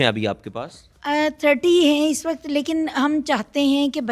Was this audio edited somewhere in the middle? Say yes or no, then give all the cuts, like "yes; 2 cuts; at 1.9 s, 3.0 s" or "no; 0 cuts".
no; 0 cuts